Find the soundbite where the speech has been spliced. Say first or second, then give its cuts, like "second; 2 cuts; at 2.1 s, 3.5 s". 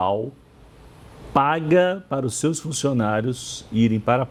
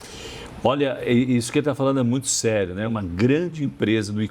second; 1 cut; at 2.9 s